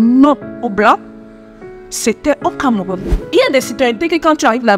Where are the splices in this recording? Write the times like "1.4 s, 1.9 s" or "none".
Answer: 3.1 s